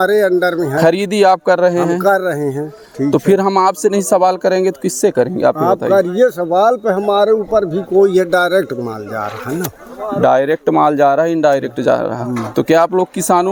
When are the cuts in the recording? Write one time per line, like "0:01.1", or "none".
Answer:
none